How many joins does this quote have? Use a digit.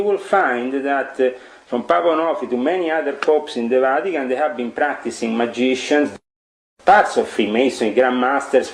1